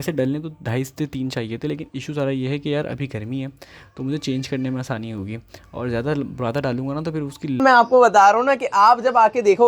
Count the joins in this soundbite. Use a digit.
1